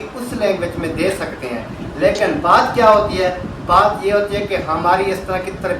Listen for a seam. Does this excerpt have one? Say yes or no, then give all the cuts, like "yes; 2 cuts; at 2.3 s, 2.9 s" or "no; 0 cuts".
no; 0 cuts